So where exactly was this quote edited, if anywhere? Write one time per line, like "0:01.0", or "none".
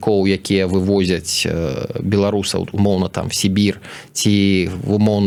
none